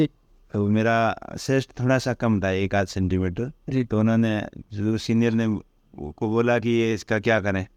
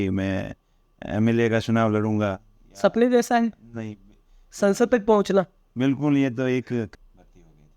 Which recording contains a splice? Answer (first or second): second